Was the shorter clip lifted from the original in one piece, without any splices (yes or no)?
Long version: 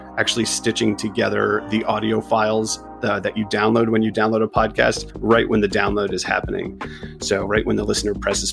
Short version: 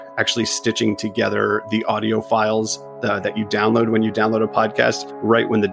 yes